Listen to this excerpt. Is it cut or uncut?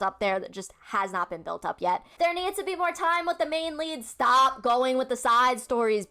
cut